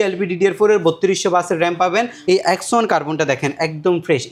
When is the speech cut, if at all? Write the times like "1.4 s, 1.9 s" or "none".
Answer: 2.1 s